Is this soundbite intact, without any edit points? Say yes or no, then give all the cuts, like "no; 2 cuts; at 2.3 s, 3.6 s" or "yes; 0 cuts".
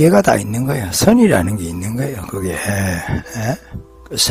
yes; 0 cuts